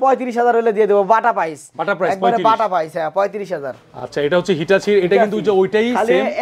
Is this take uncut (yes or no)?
yes